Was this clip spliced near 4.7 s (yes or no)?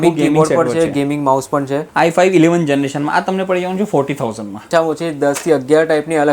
yes